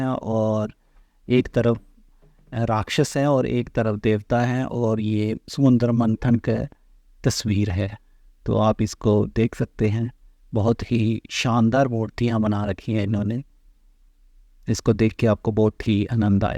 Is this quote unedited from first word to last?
yes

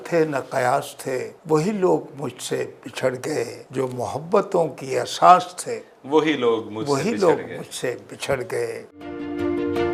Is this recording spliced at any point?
no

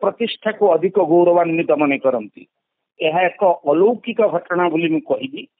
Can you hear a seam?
yes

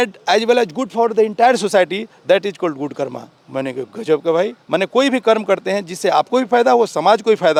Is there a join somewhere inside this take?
no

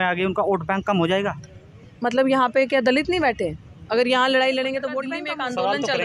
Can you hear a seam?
yes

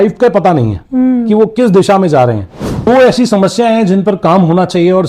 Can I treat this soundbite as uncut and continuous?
no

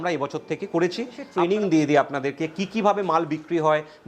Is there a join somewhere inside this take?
yes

